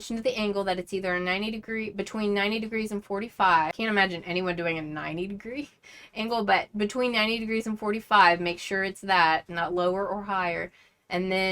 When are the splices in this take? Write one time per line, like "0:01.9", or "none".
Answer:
0:03.7